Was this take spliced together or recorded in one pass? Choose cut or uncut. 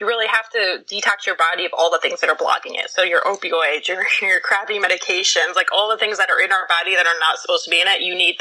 uncut